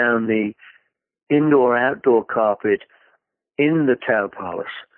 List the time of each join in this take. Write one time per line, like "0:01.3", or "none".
none